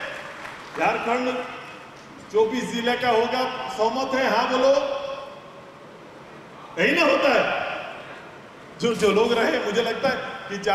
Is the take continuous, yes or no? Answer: yes